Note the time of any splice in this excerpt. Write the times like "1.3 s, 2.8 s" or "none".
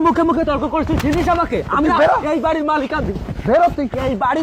none